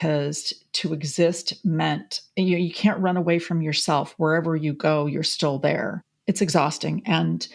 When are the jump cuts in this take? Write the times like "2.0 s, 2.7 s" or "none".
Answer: 6.1 s